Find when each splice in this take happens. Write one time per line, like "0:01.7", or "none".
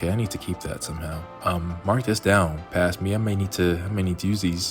none